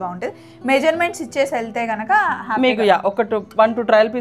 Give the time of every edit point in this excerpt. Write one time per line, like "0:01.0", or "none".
none